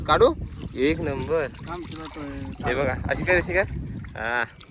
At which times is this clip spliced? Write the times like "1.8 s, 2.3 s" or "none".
none